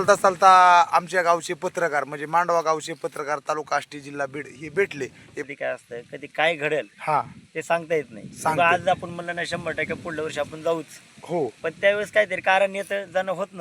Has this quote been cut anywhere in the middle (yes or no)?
yes